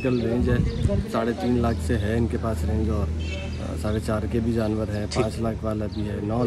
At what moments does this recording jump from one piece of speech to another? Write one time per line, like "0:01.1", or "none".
none